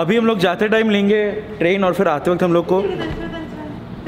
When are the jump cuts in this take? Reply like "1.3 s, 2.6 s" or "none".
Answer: none

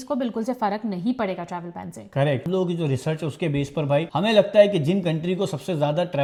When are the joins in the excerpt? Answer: none

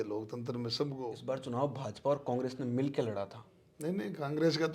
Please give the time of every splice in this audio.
1.1 s

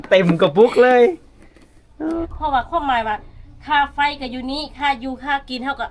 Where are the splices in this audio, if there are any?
2.2 s

